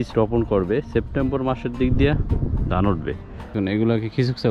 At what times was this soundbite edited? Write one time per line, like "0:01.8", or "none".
0:03.5

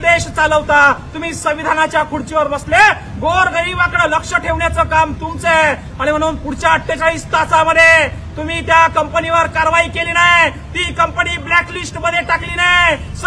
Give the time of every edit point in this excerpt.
none

